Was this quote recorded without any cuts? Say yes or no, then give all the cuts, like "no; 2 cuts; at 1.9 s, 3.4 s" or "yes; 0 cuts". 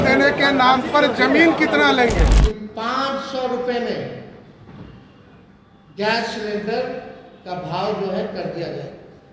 no; 1 cut; at 2.4 s